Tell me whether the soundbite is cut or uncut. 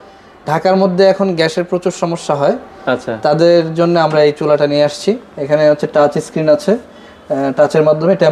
uncut